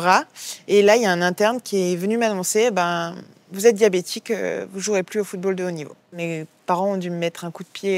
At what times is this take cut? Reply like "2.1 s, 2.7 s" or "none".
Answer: 6.2 s